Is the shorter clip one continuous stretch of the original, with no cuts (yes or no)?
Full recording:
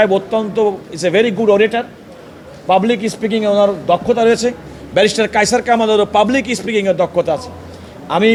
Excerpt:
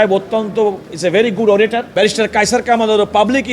no